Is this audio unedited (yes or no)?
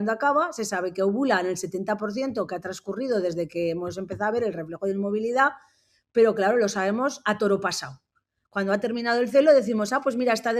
yes